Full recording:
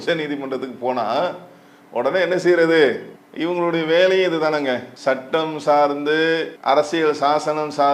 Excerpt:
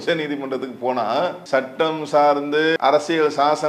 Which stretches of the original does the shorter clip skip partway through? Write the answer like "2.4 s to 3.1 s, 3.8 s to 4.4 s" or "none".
1.4 s to 4.9 s, 6.3 s to 6.6 s